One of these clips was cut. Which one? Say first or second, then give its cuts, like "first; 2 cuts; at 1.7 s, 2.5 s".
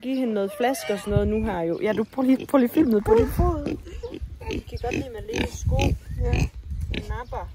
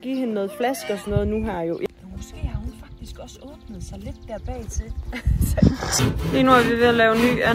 second; 2 cuts; at 1.9 s, 6.0 s